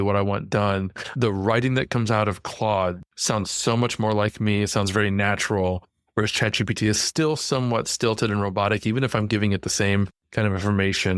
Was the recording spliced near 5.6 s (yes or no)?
no